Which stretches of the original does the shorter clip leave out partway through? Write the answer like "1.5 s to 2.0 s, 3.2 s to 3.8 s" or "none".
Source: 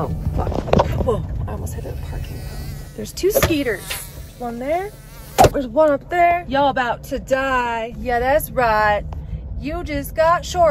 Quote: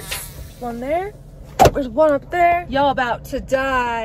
none